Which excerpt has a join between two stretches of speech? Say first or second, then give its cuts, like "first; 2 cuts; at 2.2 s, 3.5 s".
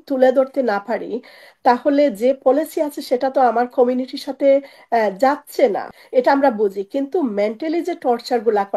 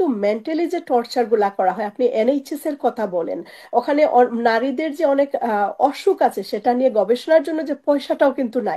first; 1 cut; at 5.9 s